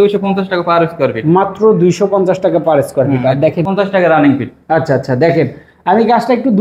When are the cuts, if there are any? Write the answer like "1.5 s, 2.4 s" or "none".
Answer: 3.6 s